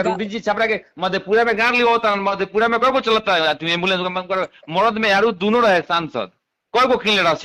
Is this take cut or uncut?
uncut